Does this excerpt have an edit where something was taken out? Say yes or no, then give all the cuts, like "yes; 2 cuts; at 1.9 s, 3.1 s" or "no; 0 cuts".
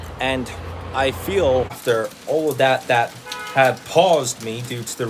yes; 1 cut; at 1.8 s